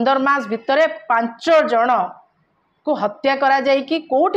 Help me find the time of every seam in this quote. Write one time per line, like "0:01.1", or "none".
none